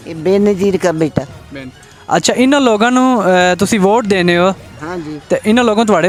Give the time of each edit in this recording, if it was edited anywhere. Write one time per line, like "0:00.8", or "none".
none